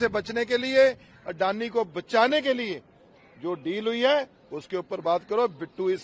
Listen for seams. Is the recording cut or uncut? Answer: uncut